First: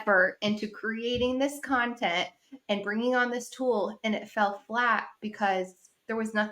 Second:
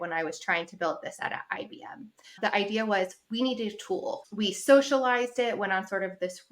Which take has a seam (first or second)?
second